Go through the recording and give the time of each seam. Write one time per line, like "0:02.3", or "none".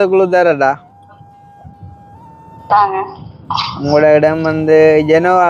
none